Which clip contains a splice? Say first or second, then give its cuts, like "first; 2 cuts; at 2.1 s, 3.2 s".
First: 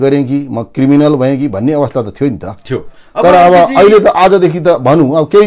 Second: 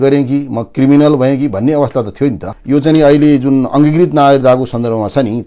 second; 1 cut; at 2.5 s